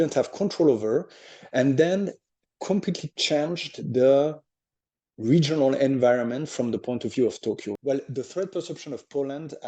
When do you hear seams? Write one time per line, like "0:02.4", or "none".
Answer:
0:07.7